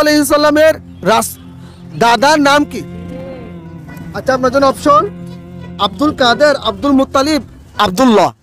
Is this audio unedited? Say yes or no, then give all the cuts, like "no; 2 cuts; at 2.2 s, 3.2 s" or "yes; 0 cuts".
yes; 0 cuts